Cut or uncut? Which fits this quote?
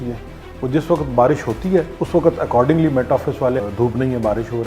cut